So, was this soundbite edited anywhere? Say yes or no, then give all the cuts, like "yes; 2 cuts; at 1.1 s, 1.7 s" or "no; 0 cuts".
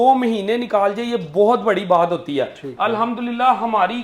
yes; 1 cut; at 2.6 s